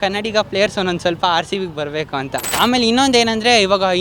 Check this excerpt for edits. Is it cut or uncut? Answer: cut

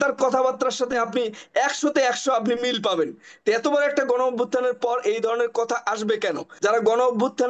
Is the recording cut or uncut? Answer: cut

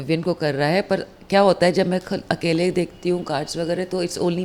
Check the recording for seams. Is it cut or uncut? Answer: uncut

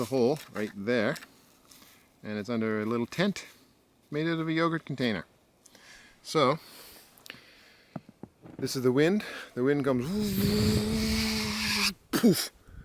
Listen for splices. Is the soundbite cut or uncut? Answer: uncut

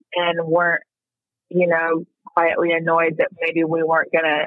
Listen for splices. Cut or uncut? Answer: uncut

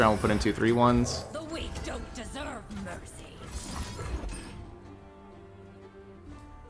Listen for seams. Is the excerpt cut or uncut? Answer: uncut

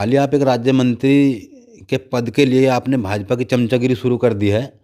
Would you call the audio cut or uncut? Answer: uncut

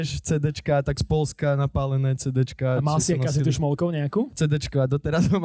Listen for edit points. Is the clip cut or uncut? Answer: cut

